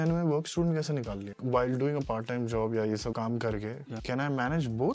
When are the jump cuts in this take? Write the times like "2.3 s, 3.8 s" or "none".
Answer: 1.4 s